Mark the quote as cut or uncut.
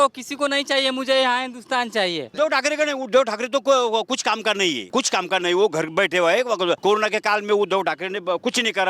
cut